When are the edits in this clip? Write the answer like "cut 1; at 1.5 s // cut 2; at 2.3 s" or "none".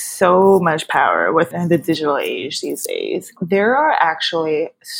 cut 1; at 1.5 s // cut 2; at 3.4 s